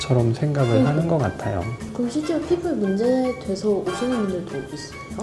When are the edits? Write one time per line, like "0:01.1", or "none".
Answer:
0:01.8

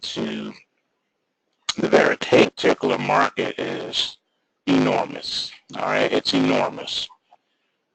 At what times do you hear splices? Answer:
none

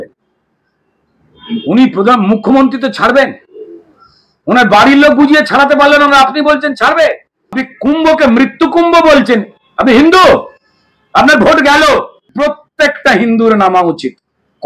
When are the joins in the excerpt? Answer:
0:07.6
0:12.2

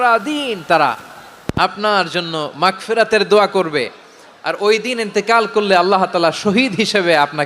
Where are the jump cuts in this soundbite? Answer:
none

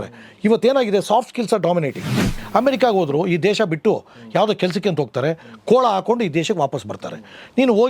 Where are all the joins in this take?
0:02.2

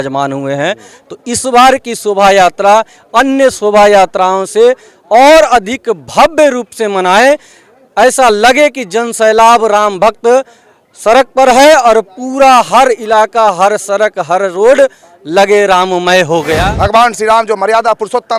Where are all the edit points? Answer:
0:16.6

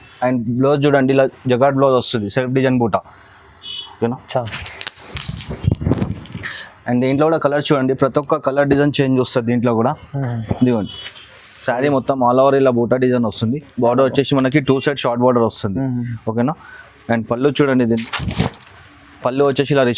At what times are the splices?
0:11.0
0:18.0

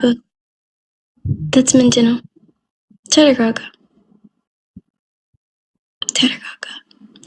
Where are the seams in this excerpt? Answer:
none

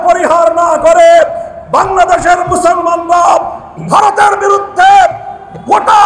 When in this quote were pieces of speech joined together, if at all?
none

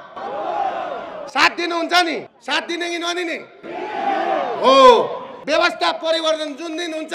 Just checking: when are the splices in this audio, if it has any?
0:02.3
0:05.3

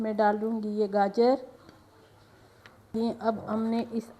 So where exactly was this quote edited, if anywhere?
0:02.9

